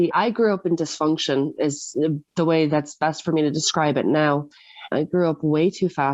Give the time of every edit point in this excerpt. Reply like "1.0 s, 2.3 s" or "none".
4.9 s